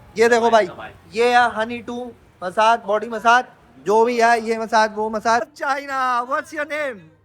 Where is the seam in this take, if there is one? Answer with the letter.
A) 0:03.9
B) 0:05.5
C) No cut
B